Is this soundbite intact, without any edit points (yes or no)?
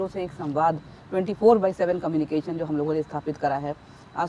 yes